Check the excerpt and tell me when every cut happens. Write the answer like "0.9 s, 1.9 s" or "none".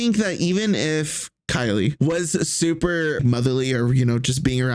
2.0 s, 3.2 s